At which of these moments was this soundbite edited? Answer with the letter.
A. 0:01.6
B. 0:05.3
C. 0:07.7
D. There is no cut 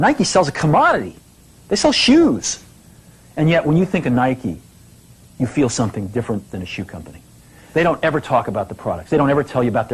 C